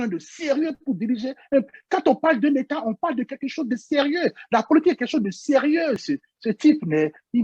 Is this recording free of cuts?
no; 1 cut; at 6.0 s

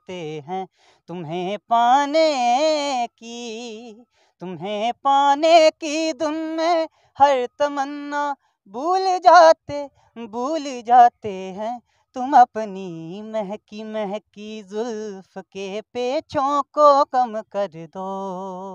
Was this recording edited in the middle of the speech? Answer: no; 0 cuts

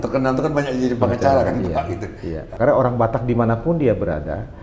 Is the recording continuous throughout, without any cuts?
no; 1 cut; at 2.5 s

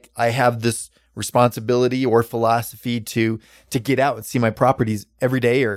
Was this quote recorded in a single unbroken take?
no; 1 cut; at 4.5 s

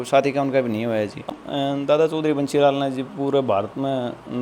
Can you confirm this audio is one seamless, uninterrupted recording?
no; 1 cut; at 1.3 s

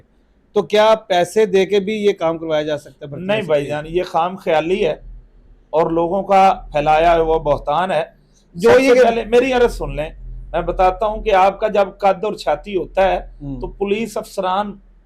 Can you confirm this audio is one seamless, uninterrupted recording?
yes; 0 cuts

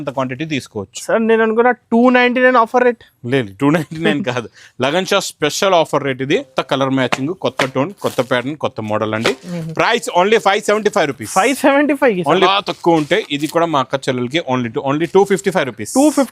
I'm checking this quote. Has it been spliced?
yes; 2 cuts; at 6.6 s, 12.5 s

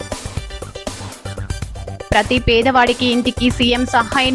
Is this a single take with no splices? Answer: yes; 0 cuts

